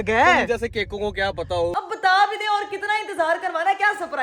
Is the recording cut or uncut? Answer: cut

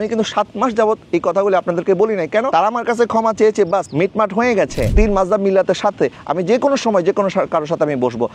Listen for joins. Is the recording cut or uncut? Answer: cut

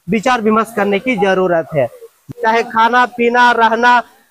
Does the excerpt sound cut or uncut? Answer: cut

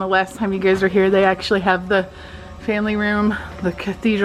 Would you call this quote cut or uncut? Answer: uncut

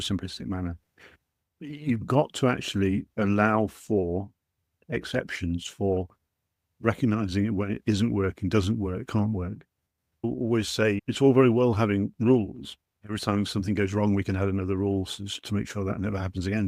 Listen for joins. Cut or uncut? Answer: uncut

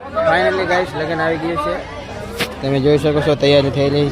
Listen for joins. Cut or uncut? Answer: uncut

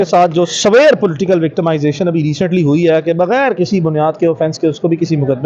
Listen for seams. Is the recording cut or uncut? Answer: uncut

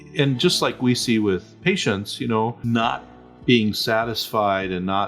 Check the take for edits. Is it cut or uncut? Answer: cut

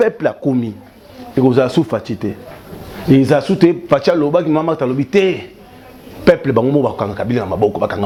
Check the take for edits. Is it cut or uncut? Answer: uncut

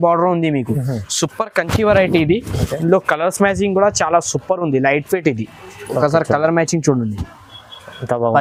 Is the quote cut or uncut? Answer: uncut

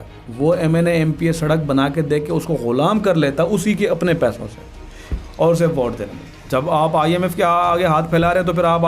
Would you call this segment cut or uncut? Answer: cut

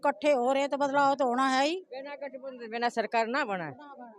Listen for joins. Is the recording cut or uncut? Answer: uncut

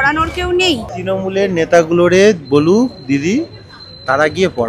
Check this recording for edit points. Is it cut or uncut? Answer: cut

